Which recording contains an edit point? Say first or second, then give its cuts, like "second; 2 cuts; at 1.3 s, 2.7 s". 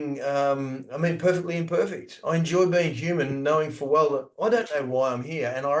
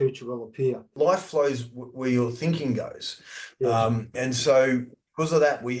second; 1 cut; at 0.9 s